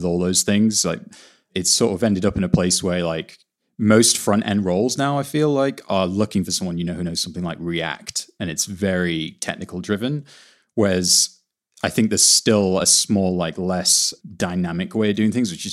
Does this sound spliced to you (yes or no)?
no